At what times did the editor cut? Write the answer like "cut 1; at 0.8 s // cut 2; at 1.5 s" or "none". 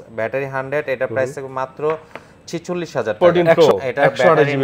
cut 1; at 3.2 s